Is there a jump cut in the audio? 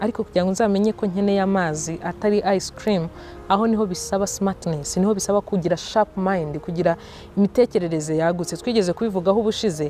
no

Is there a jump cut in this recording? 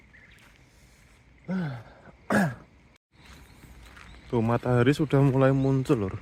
no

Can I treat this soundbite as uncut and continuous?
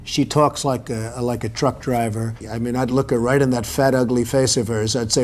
no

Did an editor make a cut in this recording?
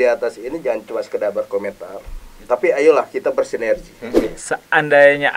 yes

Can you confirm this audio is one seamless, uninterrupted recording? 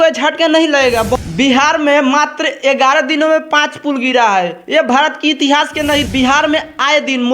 no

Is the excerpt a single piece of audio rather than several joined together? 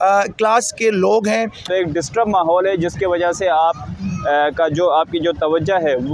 no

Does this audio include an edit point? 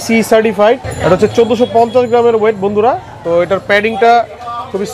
no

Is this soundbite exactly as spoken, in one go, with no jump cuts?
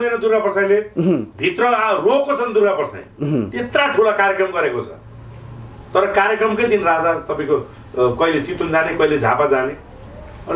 yes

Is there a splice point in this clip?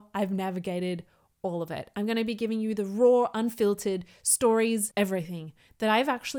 no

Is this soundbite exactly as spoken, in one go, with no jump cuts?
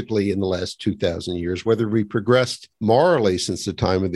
no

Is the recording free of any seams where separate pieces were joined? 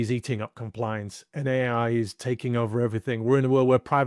yes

